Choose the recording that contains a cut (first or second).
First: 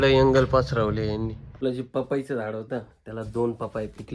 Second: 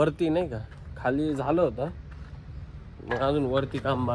first